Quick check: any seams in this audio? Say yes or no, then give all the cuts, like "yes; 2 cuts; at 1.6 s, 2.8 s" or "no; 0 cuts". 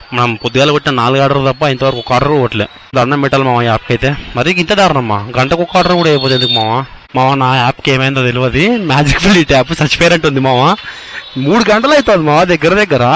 yes; 2 cuts; at 2.9 s, 7.0 s